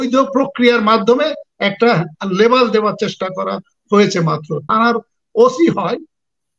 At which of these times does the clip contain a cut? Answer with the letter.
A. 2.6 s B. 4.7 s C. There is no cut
B